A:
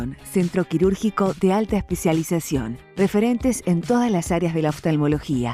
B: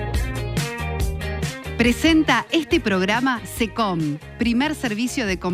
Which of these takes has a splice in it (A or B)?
B